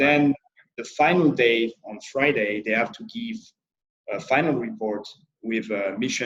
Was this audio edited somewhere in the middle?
no; 0 cuts

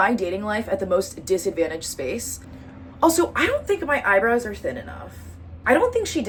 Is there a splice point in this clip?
no; 0 cuts

